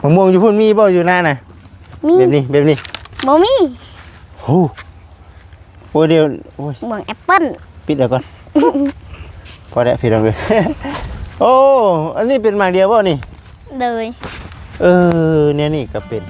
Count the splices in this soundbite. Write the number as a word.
zero